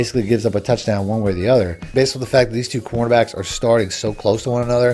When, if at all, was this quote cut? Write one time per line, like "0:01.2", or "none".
0:01.9

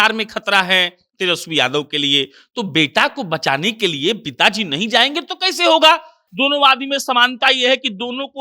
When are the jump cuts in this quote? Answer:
0:06.2

